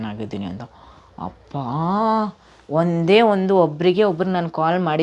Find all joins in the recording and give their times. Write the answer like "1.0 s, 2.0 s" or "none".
none